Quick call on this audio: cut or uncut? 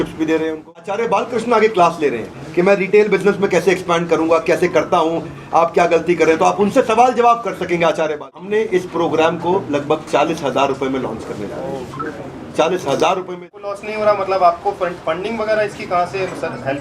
cut